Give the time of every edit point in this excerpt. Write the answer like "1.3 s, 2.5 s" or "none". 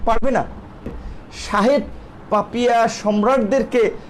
1.0 s